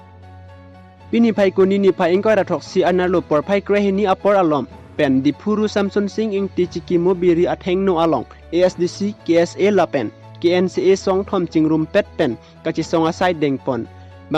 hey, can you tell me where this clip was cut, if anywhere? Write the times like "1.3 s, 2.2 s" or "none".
0.9 s